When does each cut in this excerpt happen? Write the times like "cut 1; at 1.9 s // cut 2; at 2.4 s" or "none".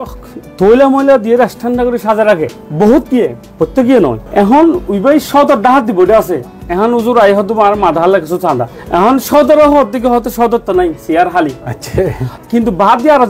none